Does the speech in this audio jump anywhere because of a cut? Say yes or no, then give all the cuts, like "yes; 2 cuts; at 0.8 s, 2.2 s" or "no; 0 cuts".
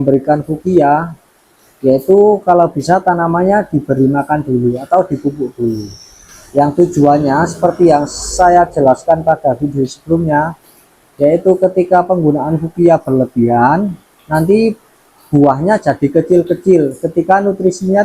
no; 0 cuts